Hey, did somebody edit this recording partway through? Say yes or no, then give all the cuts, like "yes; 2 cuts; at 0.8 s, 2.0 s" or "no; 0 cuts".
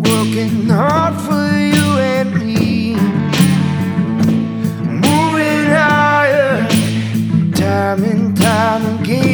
no; 0 cuts